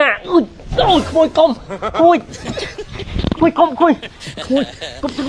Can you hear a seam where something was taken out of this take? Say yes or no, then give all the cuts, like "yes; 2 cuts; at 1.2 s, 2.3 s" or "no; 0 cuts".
no; 0 cuts